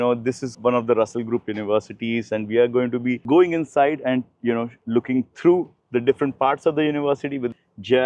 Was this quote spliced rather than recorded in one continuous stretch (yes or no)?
no